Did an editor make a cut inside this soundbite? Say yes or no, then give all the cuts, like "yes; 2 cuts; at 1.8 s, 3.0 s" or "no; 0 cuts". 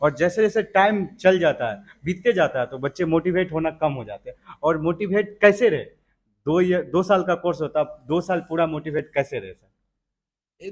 no; 0 cuts